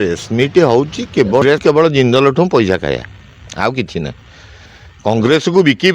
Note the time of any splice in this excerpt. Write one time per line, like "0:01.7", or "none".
0:01.4